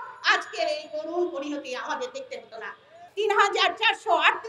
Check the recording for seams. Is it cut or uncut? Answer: cut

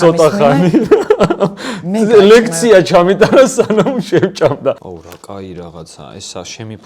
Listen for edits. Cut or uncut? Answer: cut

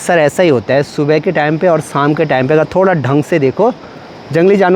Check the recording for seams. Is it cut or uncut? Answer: uncut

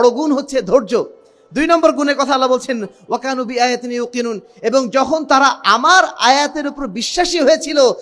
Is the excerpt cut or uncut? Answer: uncut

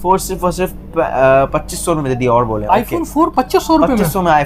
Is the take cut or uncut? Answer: uncut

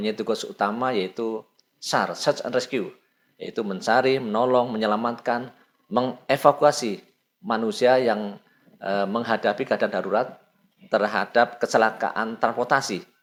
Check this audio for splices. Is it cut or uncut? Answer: uncut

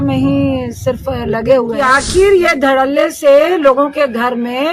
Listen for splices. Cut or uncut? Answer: cut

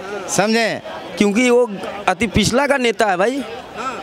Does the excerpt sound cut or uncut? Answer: cut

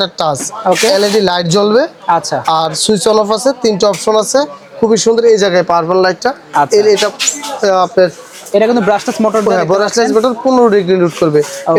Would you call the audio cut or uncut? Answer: uncut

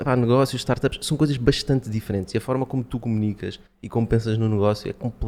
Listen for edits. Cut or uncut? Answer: uncut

